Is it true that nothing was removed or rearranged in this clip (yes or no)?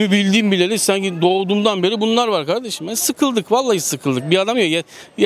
yes